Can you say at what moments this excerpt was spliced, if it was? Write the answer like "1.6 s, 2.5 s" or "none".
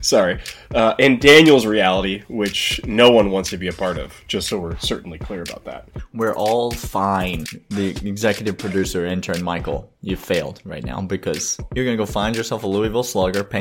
5.7 s, 7.5 s, 11.6 s